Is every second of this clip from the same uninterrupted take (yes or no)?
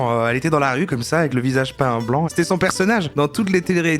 no